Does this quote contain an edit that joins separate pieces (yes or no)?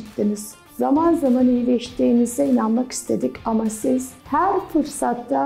no